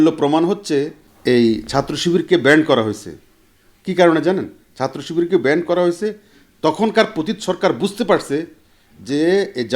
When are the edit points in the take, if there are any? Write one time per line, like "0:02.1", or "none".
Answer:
0:01.0